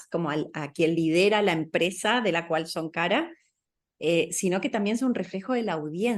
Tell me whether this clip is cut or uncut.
uncut